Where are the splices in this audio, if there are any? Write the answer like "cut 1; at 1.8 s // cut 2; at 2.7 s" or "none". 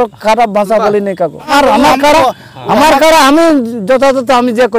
cut 1; at 1.7 s